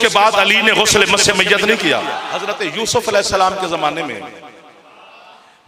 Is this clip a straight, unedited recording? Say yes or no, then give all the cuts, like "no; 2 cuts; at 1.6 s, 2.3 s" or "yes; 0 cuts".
no; 1 cut; at 2.2 s